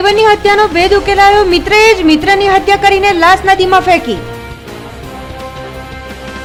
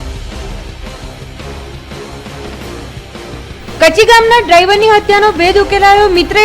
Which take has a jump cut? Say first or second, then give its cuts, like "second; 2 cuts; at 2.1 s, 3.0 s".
second; 1 cut; at 3.5 s